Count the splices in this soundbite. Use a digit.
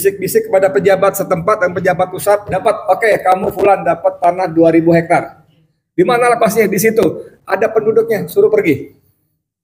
1